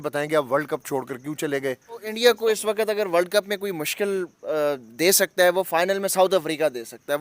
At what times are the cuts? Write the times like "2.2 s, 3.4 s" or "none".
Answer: 2.0 s